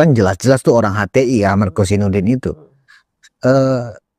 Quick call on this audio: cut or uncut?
uncut